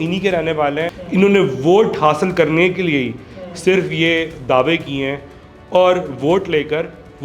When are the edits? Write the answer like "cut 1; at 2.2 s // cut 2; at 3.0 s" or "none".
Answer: cut 1; at 1.0 s